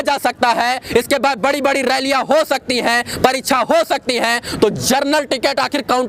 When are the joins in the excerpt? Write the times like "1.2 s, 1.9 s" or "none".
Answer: none